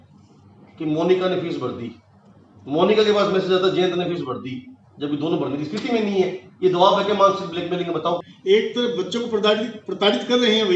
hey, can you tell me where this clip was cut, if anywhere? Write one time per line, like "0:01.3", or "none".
0:08.2